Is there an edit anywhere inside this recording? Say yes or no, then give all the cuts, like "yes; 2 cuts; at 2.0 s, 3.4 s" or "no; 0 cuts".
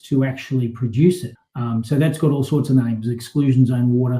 yes; 1 cut; at 1.3 s